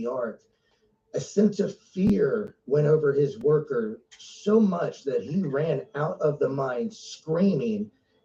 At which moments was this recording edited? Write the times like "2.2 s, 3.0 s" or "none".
none